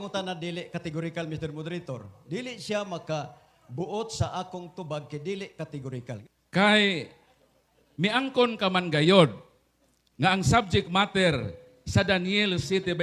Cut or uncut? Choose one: cut